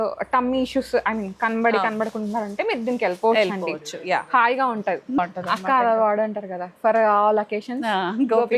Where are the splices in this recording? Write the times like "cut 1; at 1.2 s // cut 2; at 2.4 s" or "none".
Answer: cut 1; at 5.2 s